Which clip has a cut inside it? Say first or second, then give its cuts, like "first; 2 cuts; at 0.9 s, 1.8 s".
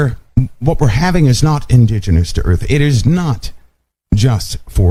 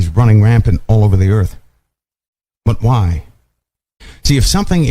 second; 1 cut; at 4.0 s